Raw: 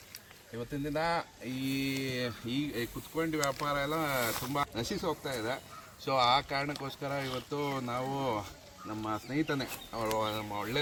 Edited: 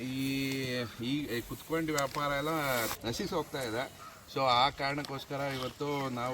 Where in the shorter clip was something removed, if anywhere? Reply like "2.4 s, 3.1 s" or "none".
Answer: 3.0 s